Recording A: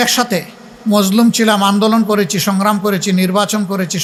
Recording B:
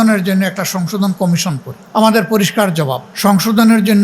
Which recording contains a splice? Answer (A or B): B